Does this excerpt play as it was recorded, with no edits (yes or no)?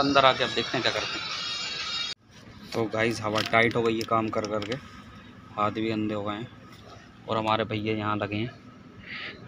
yes